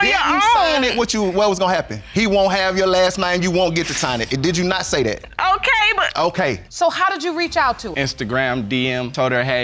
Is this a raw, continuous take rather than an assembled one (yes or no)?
no